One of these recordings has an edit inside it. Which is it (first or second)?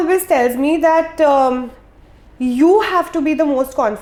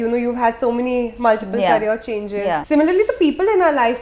second